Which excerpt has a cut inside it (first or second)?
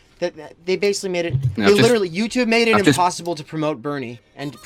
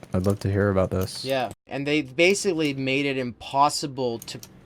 second